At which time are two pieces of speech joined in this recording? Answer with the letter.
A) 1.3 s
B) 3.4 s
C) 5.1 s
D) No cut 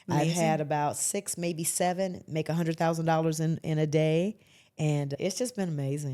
C